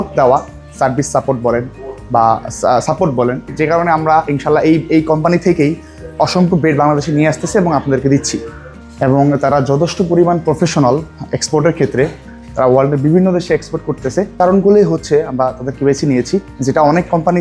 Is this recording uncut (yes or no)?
yes